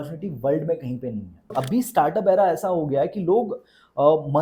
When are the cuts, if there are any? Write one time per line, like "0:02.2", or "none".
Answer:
0:01.5